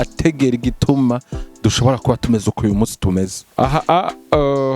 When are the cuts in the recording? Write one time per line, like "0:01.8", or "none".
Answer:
0:03.4